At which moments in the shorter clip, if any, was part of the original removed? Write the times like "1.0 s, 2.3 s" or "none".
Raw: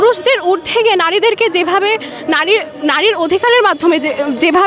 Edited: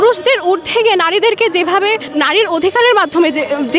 2.1 s